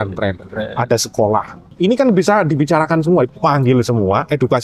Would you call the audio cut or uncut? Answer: cut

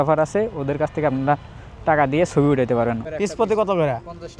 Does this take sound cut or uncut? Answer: cut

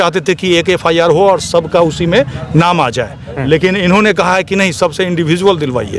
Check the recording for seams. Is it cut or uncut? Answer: uncut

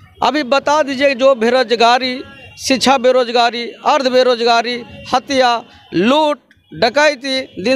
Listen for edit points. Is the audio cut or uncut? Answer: uncut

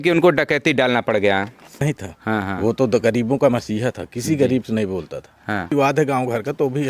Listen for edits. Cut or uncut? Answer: cut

